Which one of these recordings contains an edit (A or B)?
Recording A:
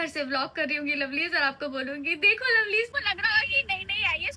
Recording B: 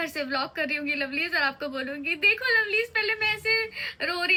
A